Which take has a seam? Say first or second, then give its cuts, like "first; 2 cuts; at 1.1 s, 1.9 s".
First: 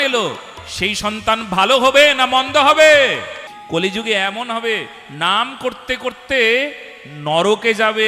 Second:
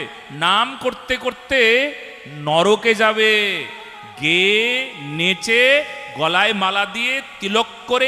first; 1 cut; at 3.5 s